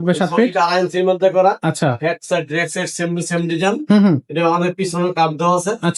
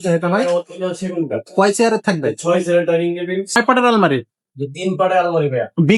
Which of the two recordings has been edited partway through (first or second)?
second